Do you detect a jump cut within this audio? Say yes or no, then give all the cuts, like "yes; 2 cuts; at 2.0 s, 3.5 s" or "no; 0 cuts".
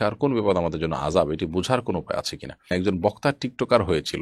yes; 1 cut; at 2.7 s